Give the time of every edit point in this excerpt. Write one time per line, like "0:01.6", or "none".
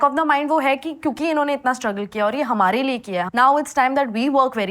0:03.3